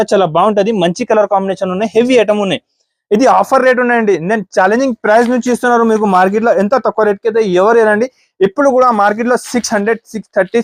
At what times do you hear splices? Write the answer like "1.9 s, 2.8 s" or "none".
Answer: none